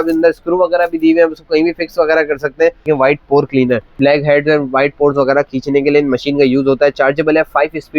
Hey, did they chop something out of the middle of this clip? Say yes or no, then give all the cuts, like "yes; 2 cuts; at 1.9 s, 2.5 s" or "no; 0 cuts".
yes; 2 cuts; at 2.9 s, 4.0 s